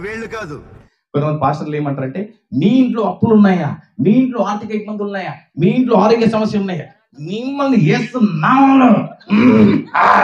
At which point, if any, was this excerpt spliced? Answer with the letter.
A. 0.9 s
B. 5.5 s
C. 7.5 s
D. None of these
A